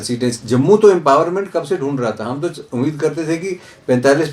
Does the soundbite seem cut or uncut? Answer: uncut